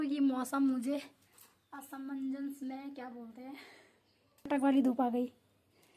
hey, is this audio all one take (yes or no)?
no